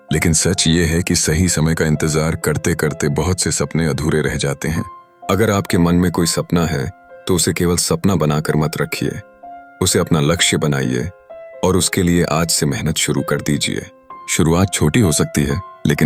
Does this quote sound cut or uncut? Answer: uncut